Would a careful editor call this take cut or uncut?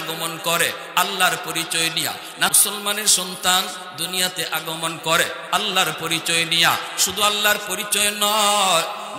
cut